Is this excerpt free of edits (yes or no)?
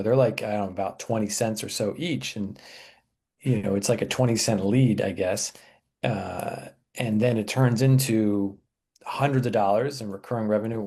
yes